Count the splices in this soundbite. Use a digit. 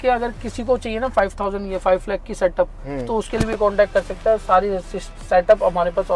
0